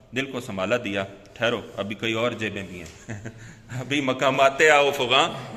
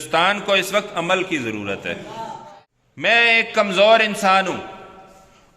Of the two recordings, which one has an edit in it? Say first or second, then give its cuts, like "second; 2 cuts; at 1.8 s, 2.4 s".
second; 1 cut; at 2.4 s